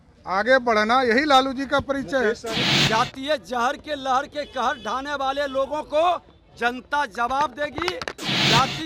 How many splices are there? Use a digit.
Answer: 1